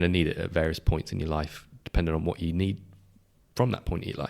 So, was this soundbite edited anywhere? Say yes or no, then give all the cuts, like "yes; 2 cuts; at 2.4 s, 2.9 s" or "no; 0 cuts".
no; 0 cuts